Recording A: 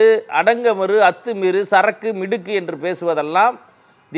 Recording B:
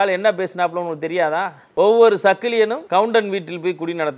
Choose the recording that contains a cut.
B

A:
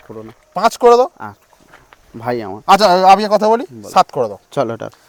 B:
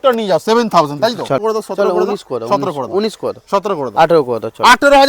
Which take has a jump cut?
B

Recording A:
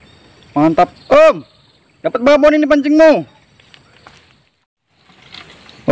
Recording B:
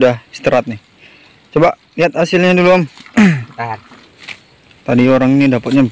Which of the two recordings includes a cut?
A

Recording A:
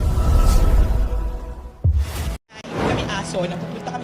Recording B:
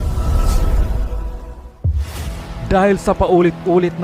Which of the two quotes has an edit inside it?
A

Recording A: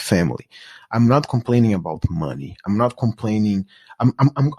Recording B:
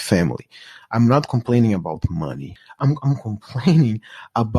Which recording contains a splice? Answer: B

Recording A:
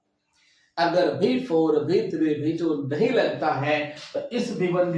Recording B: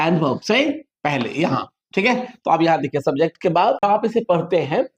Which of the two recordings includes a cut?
B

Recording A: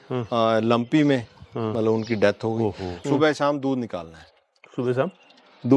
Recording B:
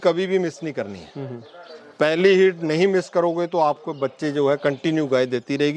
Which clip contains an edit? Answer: A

